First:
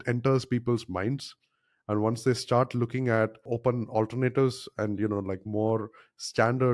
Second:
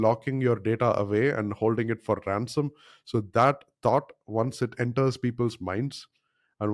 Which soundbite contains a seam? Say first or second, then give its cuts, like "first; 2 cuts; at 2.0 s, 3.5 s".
first; 1 cut; at 3.4 s